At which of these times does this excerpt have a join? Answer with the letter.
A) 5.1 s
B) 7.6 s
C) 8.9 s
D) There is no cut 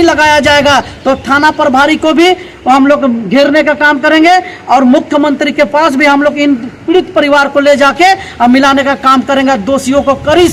D